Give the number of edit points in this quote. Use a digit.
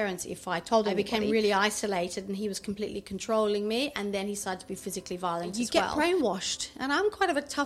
2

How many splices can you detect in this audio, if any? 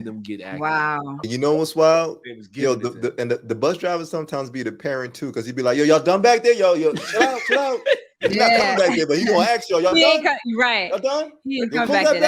1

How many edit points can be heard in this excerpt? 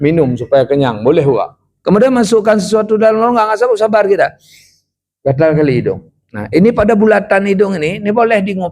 1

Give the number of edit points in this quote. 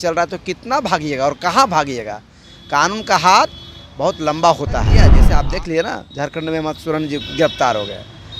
1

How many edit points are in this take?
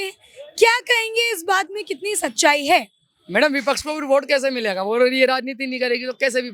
0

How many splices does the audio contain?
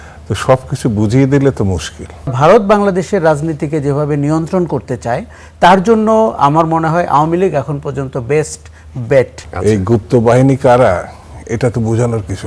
2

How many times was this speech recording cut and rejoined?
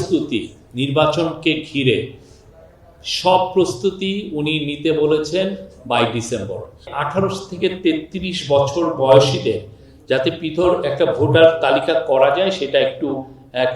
1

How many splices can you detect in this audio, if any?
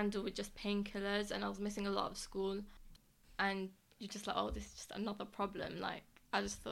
1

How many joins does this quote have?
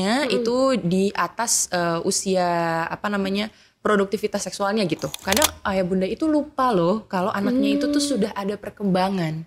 1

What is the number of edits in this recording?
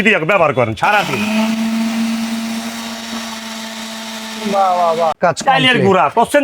1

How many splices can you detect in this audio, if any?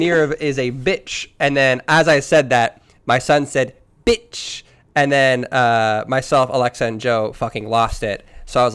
1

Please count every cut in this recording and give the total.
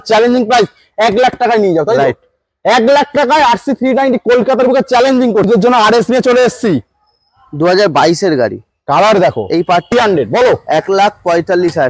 2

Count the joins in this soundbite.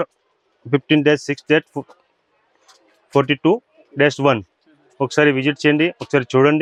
0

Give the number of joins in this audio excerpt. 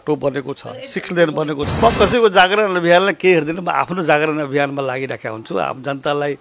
1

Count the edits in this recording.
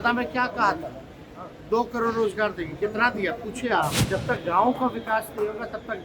1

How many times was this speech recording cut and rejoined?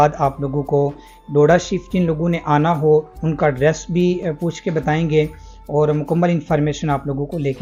0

